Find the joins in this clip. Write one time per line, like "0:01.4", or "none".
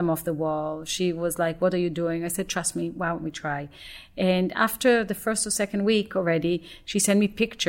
none